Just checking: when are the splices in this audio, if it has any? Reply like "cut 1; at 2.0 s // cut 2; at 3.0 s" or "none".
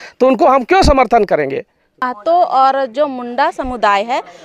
cut 1; at 2.0 s